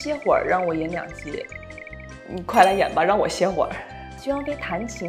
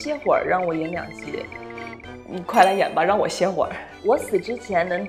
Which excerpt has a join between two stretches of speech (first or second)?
second